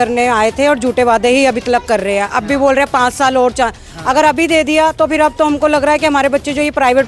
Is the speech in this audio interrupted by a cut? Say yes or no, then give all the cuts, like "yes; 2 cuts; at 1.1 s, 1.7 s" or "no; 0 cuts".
no; 0 cuts